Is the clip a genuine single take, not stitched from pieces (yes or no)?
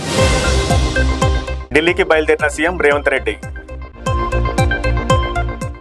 yes